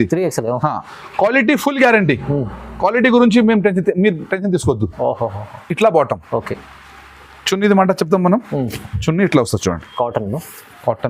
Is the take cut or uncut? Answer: uncut